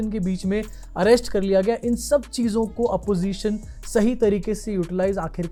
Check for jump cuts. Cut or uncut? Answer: uncut